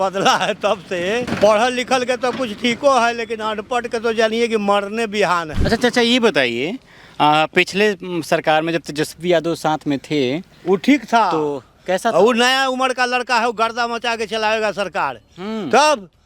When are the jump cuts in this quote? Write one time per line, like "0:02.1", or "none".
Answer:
0:01.3
0:05.5